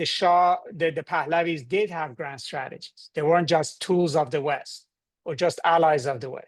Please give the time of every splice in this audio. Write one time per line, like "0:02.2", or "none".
none